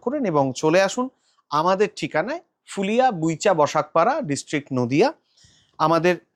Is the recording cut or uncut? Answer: uncut